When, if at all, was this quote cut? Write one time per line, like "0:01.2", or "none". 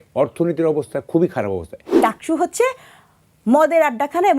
0:02.0